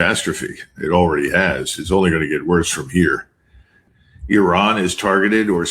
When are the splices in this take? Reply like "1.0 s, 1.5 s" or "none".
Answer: 3.9 s